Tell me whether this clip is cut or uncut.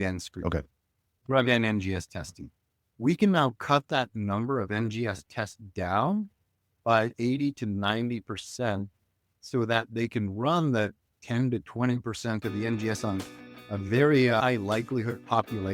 uncut